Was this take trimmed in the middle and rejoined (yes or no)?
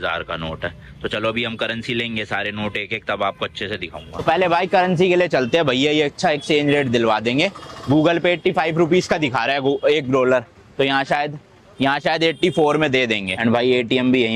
no